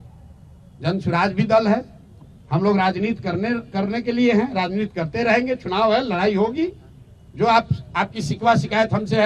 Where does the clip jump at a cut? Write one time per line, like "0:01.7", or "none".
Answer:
none